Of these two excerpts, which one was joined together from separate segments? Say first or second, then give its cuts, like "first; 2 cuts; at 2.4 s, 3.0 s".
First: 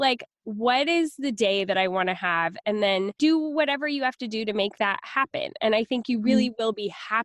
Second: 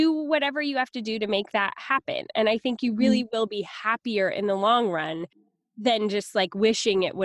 second; 1 cut; at 5.3 s